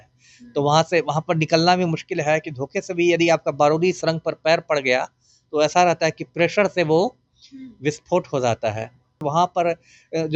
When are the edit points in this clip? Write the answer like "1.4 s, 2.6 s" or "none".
9.2 s